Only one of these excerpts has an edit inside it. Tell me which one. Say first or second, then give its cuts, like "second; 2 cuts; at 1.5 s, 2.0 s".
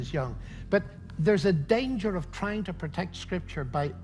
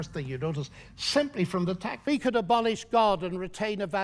second; 1 cut; at 1.9 s